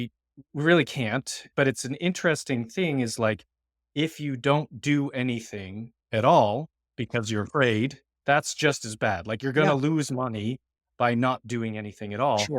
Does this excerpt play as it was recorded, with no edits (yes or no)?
no